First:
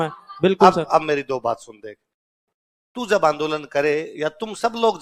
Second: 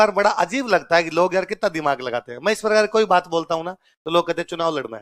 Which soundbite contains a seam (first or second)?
first